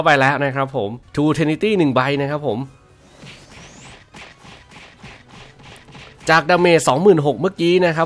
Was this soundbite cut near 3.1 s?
no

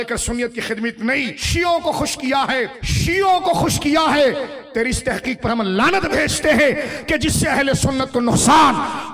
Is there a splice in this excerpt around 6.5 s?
no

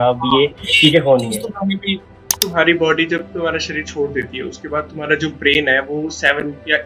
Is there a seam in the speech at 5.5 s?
no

